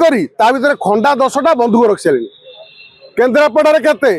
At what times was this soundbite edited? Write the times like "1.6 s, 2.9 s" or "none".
none